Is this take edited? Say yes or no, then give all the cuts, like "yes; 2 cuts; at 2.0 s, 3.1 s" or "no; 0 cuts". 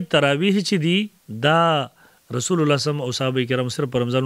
yes; 1 cut; at 1.2 s